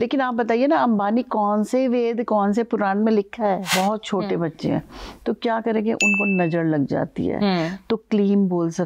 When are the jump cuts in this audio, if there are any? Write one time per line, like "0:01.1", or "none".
0:03.7